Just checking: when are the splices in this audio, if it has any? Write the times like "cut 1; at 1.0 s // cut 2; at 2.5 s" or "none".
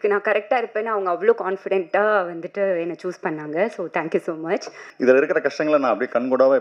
cut 1; at 4.8 s